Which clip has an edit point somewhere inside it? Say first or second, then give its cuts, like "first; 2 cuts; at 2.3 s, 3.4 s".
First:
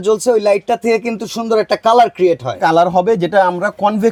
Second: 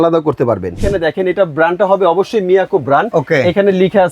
second; 2 cuts; at 0.8 s, 3.1 s